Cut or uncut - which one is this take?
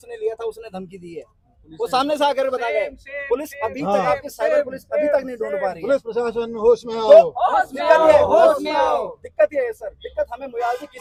uncut